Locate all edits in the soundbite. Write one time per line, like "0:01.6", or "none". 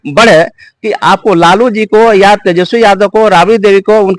none